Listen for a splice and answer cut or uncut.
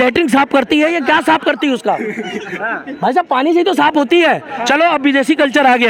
uncut